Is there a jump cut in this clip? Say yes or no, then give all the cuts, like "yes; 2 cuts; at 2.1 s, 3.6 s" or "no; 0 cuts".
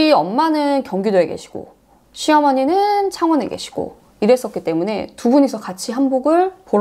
no; 0 cuts